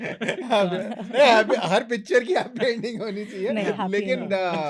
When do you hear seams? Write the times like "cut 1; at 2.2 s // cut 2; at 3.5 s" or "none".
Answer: none